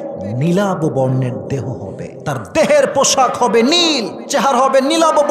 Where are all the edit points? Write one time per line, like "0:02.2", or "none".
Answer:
0:02.1
0:04.2